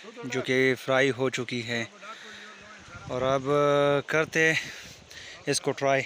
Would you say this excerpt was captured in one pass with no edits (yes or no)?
yes